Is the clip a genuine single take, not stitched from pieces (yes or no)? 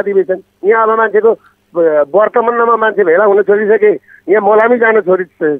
yes